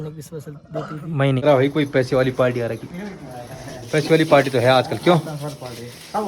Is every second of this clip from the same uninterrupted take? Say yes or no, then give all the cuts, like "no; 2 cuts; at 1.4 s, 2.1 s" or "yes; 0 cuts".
no; 1 cut; at 1.4 s